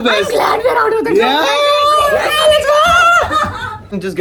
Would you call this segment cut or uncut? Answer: uncut